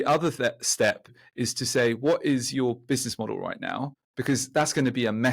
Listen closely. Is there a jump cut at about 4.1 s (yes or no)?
no